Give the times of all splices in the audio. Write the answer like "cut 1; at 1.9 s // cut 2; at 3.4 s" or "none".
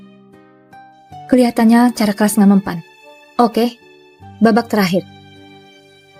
none

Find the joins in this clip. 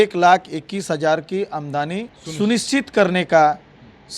cut 1; at 2.2 s

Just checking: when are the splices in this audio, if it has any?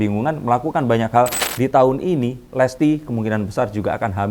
cut 1; at 1.4 s

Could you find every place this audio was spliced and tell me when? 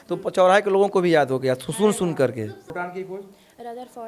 cut 1; at 2.7 s

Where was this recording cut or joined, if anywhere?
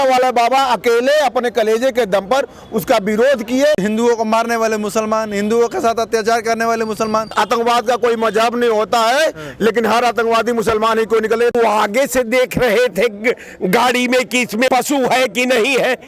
cut 1; at 3.8 s // cut 2; at 7.3 s // cut 3; at 11.5 s

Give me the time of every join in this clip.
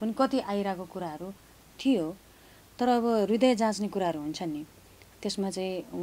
none

